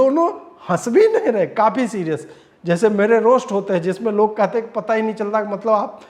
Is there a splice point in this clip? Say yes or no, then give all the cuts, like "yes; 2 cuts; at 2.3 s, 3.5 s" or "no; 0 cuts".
no; 0 cuts